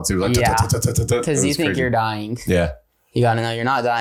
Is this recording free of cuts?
yes; 0 cuts

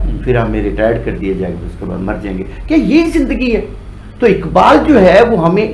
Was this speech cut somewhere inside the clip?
no; 0 cuts

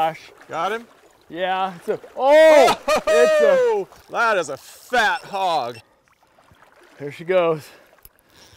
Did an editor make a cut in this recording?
yes; 1 cut; at 4.0 s

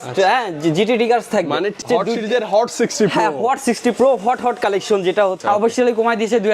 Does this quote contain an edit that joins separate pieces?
yes; 2 cuts; at 1.8 s, 5.4 s

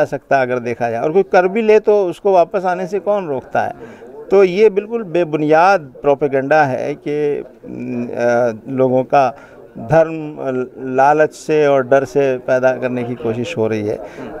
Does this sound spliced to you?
no; 0 cuts

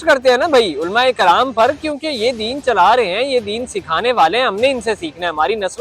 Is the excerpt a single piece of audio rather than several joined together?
yes; 0 cuts

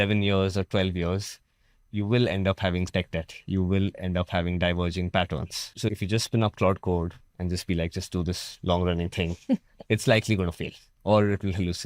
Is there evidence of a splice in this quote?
no; 0 cuts

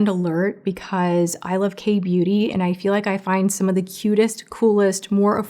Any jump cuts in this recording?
no; 0 cuts

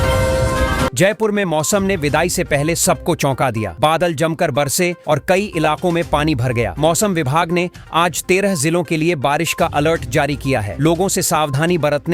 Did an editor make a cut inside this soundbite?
yes; 1 cut; at 0.9 s

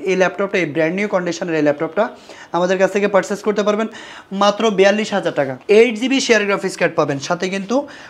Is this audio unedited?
no; 1 cut; at 5.6 s

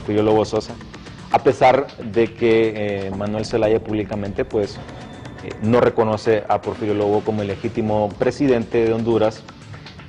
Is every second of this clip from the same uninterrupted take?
no; 1 cut; at 3.7 s

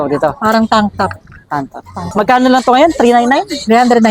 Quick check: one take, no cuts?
no; 1 cut; at 2.0 s

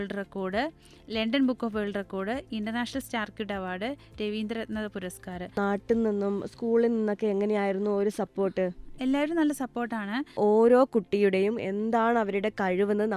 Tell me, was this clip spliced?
yes; 2 cuts; at 5.6 s, 10.4 s

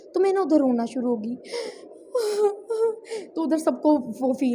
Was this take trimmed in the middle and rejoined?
no; 0 cuts

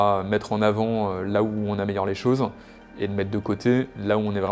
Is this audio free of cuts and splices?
yes; 0 cuts

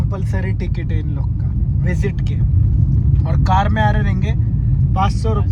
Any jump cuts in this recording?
no; 0 cuts

